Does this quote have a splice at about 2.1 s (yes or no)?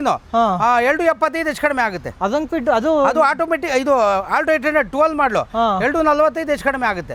no